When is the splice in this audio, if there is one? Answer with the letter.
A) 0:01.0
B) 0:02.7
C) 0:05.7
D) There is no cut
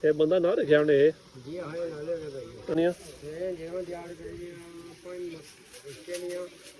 B